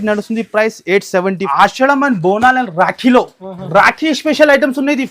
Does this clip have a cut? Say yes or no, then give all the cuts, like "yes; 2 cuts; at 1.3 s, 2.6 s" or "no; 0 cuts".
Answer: yes; 1 cut; at 1.4 s